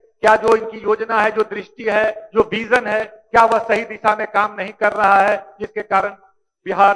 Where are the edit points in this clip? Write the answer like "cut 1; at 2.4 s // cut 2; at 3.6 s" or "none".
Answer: none